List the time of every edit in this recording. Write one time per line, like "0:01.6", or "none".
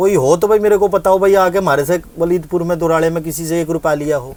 none